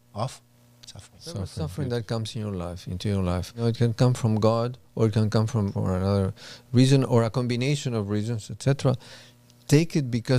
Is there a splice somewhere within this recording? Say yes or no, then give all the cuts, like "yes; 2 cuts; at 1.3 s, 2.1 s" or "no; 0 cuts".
yes; 3 cuts; at 1.6 s, 3.6 s, 5.7 s